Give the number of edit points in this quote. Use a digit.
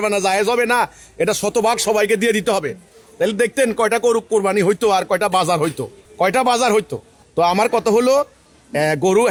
0